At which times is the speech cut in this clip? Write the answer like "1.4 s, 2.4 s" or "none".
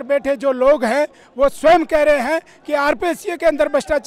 none